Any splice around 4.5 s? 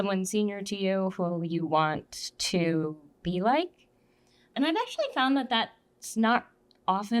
yes; 1 cut; at 4.5 s

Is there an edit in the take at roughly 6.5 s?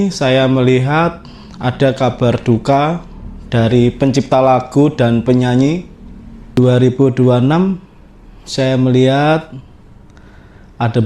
yes; 1 cut; at 6.5 s

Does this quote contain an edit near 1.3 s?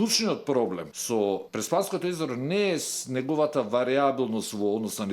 yes; 1 cut; at 1.3 s

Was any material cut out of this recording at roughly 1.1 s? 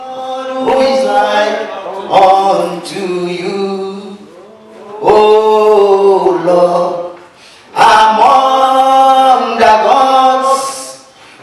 yes; 1 cut; at 1.1 s

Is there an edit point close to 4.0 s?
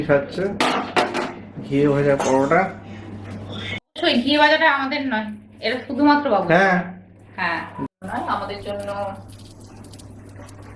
yes; 2 cuts; at 4.0 s, 7.9 s

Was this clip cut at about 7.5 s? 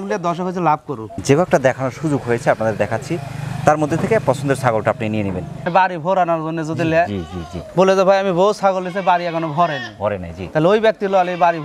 no; 2 cuts; at 1.2 s, 5.7 s

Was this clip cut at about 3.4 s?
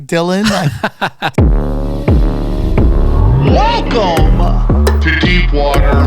no; 1 cut; at 1.2 s

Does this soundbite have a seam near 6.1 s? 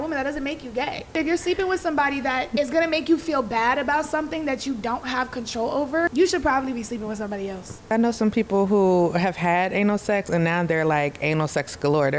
yes; 4 cuts; at 1.1 s, 2.5 s, 6.1 s, 7.9 s

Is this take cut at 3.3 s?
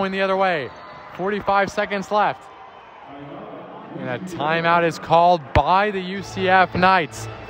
no; 0 cuts

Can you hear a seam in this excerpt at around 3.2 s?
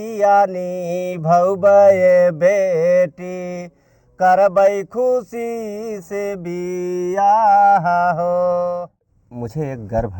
no; 1 cut; at 9.2 s

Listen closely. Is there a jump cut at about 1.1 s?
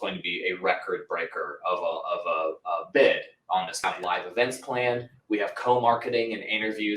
no; 1 cut; at 3.8 s

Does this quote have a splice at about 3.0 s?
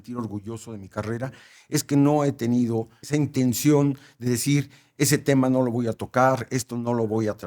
yes; 1 cut; at 3.0 s

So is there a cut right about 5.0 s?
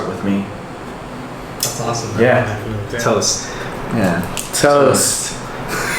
no; 1 cut; at 2.8 s

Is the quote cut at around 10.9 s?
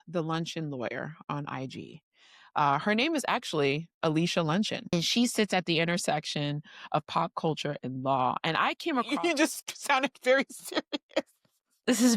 no; 2 cuts; at 4.9 s, 9.5 s

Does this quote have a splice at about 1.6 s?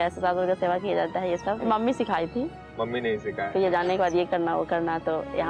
yes; 1 cut; at 1.6 s

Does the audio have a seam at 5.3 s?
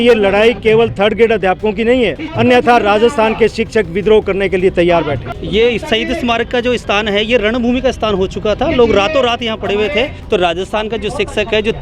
yes; 3 cuts; at 2.2 s, 5.3 s, 10.2 s

